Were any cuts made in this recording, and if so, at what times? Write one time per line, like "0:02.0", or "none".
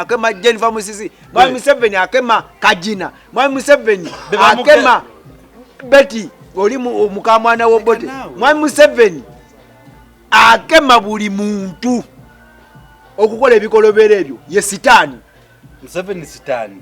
none